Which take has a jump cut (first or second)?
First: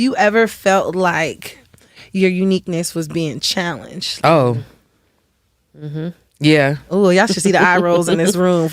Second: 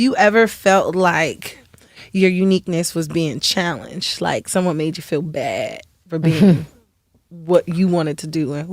first